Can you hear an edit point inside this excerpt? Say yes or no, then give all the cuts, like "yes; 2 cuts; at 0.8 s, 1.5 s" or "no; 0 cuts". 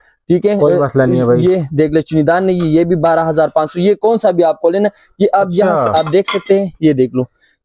no; 0 cuts